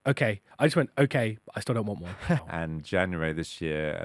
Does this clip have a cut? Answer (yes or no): yes